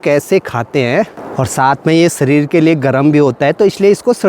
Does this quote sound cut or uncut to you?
cut